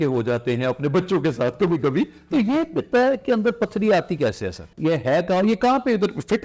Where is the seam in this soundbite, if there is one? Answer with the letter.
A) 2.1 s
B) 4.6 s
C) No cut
B